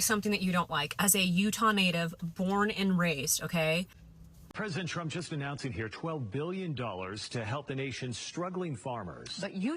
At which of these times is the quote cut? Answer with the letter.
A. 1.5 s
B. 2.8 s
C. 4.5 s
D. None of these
C